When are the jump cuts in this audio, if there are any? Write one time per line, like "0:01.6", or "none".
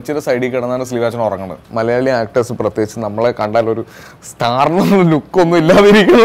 0:01.6